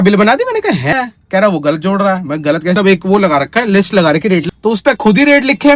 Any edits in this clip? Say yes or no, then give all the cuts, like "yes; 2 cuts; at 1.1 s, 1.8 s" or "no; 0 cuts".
yes; 3 cuts; at 0.9 s, 2.8 s, 4.4 s